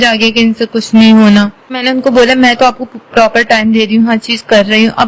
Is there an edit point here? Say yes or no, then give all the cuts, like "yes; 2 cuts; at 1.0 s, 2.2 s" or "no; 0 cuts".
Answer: yes; 1 cut; at 1.8 s